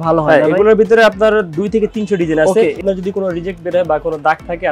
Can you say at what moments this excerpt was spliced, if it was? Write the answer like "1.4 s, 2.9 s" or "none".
2.8 s